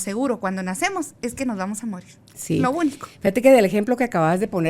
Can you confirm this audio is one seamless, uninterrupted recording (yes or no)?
yes